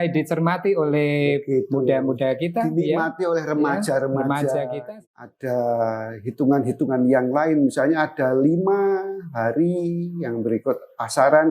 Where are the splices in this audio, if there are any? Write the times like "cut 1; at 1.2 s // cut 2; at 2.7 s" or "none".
cut 1; at 4.8 s